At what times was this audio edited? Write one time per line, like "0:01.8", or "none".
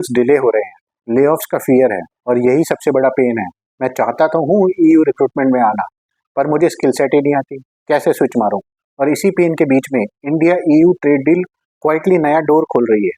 0:02.1